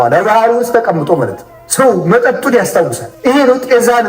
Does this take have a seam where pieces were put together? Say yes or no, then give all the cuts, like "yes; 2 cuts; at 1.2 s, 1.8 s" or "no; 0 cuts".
yes; 2 cuts; at 1.5 s, 3.0 s